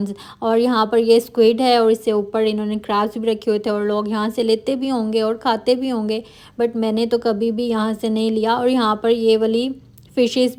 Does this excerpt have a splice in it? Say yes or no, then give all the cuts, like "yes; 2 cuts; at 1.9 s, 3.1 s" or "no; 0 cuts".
no; 0 cuts